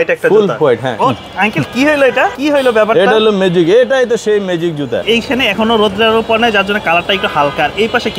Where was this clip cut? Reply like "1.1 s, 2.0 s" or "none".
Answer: 1.0 s, 2.4 s, 5.0 s